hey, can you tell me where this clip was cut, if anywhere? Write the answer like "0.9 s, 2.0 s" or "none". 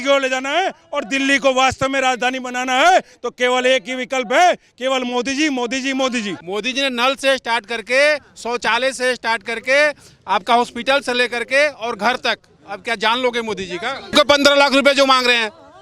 6.4 s, 14.1 s